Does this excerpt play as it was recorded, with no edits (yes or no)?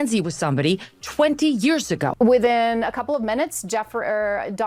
no